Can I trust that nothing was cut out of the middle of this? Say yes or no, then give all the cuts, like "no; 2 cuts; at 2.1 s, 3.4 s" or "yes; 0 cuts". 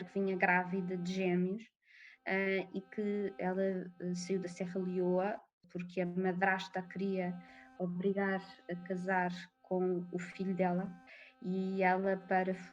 no; 1 cut; at 5.6 s